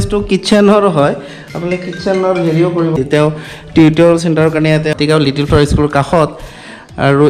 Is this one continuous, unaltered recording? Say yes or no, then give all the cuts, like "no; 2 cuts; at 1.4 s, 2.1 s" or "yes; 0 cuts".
no; 2 cuts; at 3.0 s, 4.9 s